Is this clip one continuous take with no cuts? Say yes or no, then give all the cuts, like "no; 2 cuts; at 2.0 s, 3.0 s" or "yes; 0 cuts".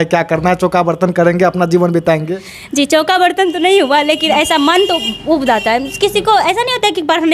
yes; 0 cuts